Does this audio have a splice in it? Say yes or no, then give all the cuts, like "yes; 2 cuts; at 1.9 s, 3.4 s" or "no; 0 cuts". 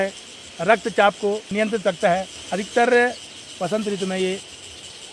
no; 0 cuts